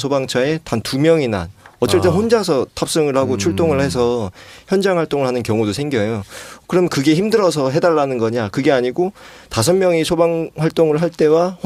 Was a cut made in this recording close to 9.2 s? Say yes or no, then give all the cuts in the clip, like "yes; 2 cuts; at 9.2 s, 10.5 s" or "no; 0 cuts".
no; 0 cuts